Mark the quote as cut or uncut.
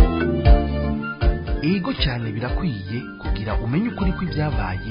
cut